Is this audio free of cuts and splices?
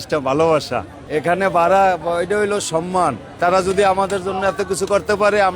no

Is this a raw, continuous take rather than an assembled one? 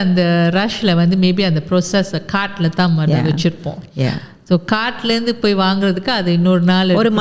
yes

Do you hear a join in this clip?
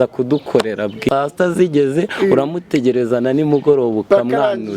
no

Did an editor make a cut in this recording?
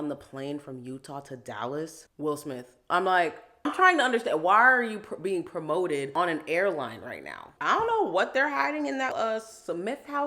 yes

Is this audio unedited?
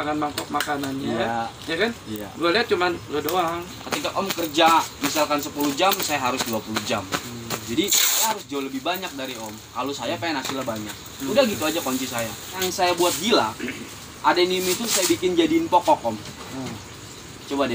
no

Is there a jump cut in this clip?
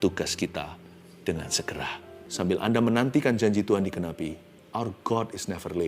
yes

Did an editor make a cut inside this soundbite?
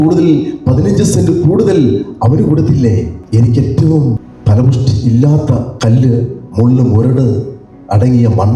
yes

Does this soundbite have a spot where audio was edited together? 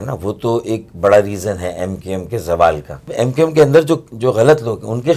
yes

